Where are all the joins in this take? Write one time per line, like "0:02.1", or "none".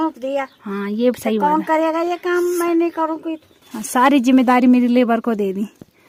none